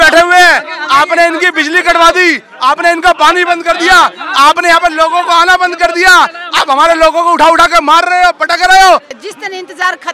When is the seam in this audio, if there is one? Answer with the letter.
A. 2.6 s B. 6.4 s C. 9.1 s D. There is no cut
C